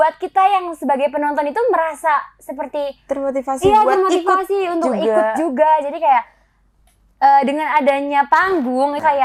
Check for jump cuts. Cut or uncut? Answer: uncut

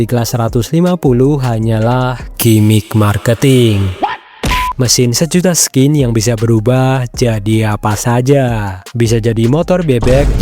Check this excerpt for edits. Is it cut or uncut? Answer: cut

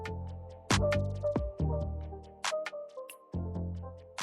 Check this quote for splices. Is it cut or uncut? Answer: uncut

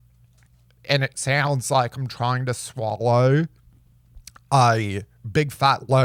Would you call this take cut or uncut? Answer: uncut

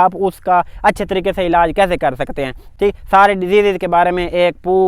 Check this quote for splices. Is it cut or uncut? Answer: uncut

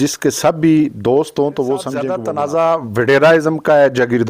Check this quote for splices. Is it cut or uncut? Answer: cut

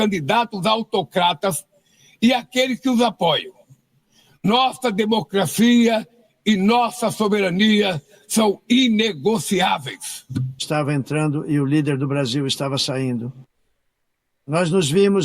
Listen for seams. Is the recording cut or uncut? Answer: cut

